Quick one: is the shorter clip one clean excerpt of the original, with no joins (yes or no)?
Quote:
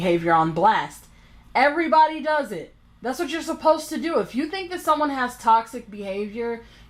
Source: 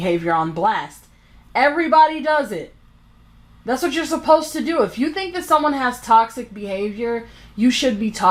no